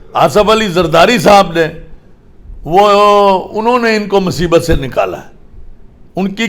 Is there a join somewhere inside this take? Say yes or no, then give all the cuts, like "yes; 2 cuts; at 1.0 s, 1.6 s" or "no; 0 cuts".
no; 0 cuts